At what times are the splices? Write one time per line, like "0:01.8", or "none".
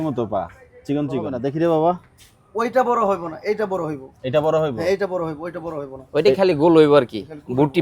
0:01.4